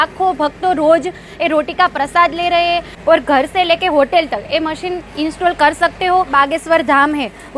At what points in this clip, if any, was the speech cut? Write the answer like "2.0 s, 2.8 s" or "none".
2.9 s, 6.3 s